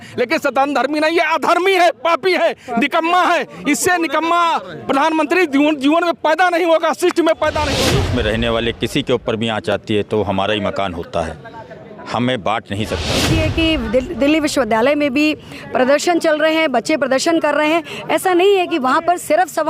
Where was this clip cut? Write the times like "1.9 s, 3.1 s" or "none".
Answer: 7.7 s, 13.1 s